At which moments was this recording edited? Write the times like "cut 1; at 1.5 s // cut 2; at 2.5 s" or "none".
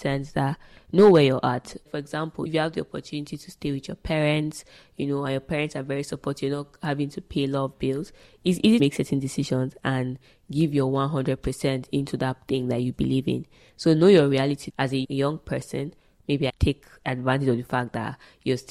none